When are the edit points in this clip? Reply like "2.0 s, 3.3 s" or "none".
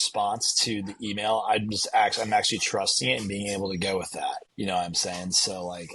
4.5 s